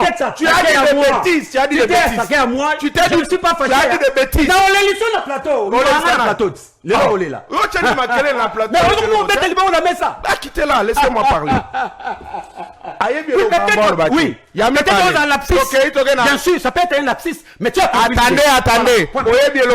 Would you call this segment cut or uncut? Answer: uncut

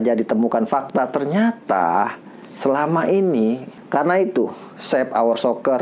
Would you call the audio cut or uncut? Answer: cut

